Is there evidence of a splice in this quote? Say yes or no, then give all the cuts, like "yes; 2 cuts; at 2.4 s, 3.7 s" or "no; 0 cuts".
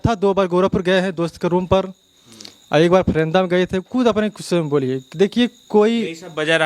no; 0 cuts